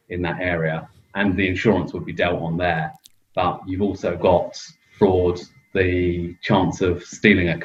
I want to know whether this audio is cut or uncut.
uncut